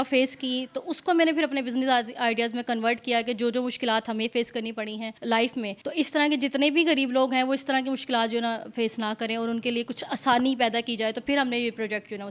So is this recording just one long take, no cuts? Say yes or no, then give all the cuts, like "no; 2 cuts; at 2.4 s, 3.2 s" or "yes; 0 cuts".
no; 2 cuts; at 5.1 s, 5.8 s